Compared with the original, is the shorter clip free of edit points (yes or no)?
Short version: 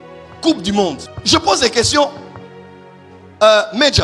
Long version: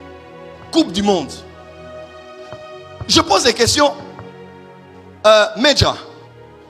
no